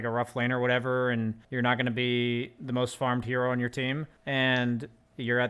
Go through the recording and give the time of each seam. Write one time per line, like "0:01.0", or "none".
0:01.4
0:04.1

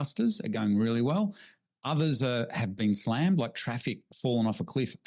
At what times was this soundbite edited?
none

